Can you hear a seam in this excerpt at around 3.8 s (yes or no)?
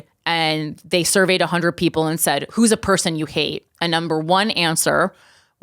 no